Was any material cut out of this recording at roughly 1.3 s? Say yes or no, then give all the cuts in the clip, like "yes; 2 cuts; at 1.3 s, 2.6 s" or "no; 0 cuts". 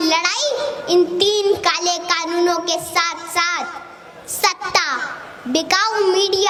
no; 0 cuts